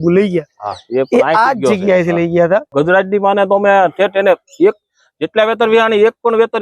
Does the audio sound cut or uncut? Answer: cut